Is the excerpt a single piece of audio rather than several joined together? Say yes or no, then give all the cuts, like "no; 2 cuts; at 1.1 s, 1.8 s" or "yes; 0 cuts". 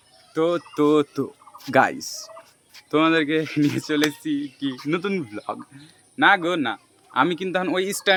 yes; 0 cuts